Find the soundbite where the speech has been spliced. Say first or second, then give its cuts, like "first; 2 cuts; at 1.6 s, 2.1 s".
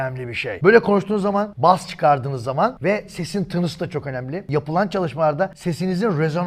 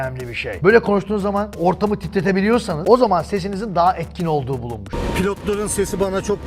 second; 3 cuts; at 1.5 s, 2.8 s, 4.9 s